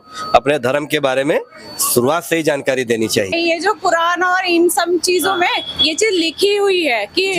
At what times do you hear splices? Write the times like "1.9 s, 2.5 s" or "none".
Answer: 3.3 s

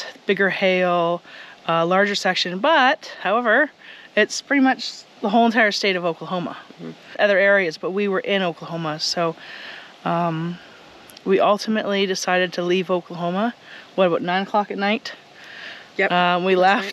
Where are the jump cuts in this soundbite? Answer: 7.1 s

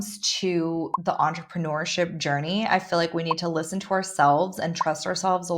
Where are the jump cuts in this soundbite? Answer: 0.9 s

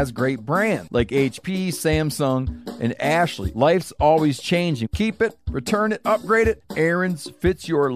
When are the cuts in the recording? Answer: 0.8 s, 3.4 s, 4.8 s, 6.7 s

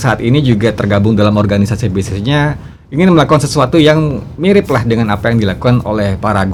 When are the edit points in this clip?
none

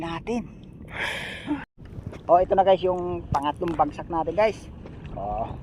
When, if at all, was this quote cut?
1.8 s

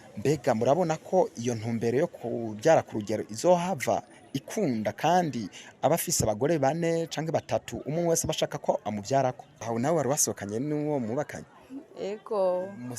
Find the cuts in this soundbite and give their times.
9.5 s

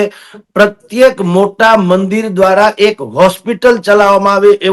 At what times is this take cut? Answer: none

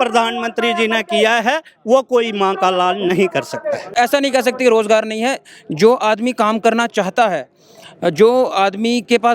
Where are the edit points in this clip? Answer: 3.9 s

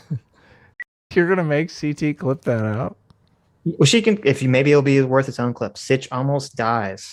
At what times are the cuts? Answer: 1.0 s

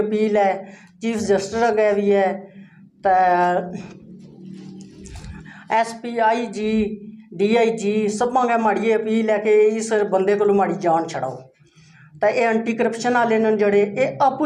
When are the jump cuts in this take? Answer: none

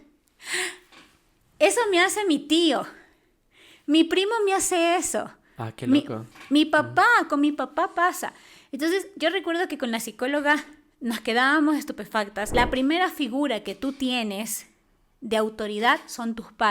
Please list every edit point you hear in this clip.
12.5 s

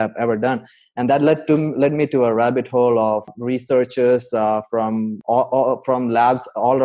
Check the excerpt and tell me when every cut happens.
3.4 s, 5.1 s

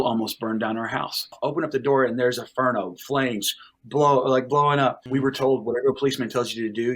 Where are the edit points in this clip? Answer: 1.4 s, 5.0 s

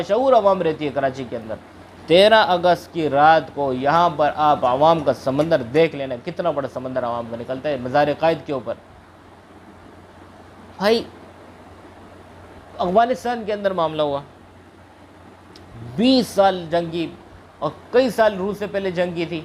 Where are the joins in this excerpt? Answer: none

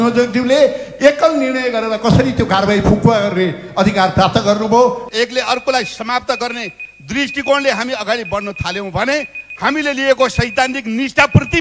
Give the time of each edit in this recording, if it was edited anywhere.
5.0 s

